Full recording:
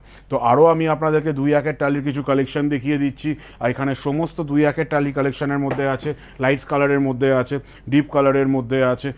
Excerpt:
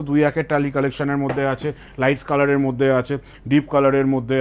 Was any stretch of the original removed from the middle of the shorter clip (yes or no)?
no